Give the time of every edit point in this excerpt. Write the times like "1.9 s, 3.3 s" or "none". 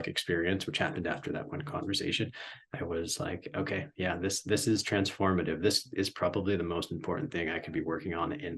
none